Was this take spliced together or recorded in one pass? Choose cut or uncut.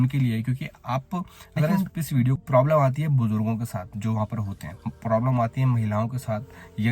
cut